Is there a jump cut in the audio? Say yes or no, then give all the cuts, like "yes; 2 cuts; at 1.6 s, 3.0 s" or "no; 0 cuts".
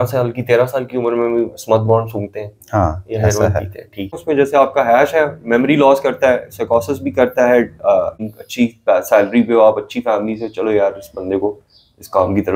yes; 2 cuts; at 4.2 s, 8.2 s